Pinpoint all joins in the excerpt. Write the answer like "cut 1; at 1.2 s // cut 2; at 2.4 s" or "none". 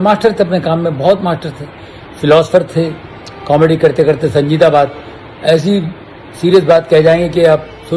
none